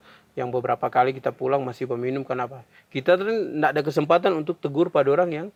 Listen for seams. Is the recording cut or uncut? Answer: uncut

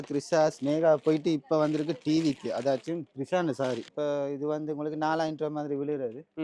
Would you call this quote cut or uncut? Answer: cut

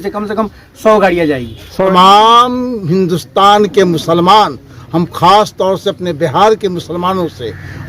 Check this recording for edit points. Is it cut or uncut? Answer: cut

